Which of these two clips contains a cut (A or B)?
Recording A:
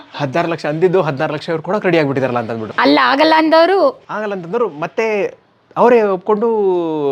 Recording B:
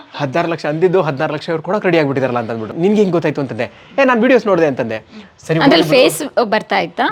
B